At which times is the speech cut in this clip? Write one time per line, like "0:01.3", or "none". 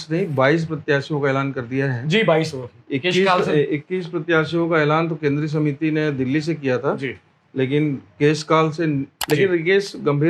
0:09.2